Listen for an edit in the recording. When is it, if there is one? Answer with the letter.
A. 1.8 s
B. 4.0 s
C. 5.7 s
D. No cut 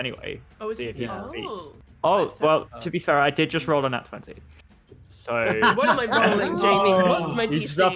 A